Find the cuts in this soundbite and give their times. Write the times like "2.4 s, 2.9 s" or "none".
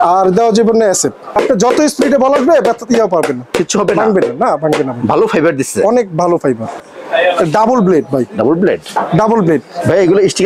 1.3 s, 6.9 s